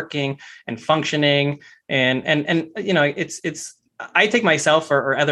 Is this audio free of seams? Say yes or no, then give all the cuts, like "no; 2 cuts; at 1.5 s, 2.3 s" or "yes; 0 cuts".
yes; 0 cuts